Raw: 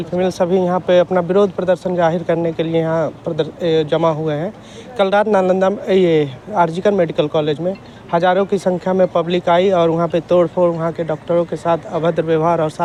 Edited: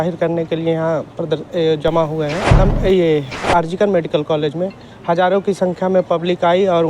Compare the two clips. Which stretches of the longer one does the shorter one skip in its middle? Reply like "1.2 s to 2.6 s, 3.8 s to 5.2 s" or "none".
4.6 s to 5.6 s